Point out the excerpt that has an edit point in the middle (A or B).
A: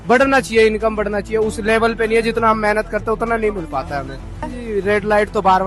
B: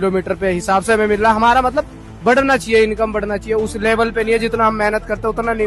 A